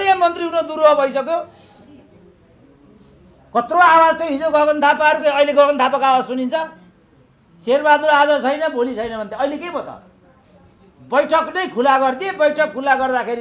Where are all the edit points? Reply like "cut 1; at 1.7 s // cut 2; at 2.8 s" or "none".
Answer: none

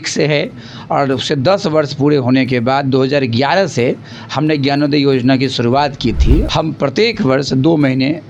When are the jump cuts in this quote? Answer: cut 1; at 6.5 s

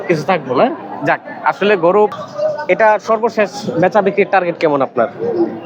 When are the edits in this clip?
cut 1; at 2.1 s

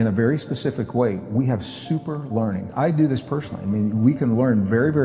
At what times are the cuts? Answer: cut 1; at 2.7 s

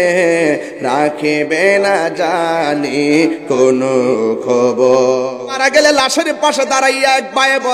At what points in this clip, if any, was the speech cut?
cut 1; at 5.4 s

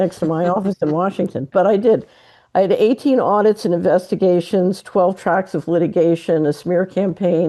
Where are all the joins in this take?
none

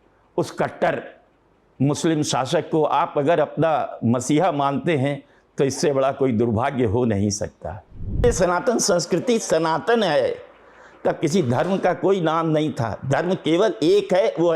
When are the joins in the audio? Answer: cut 1; at 8.2 s

